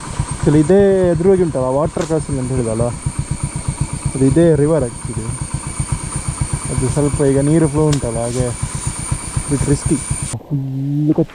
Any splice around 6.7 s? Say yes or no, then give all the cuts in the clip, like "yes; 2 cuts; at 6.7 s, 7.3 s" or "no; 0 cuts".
no; 1 cut; at 10.4 s